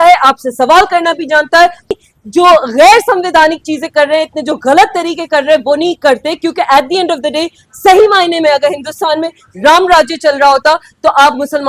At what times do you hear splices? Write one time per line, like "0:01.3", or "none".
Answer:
0:01.9